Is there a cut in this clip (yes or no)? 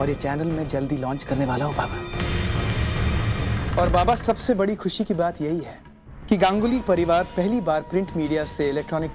yes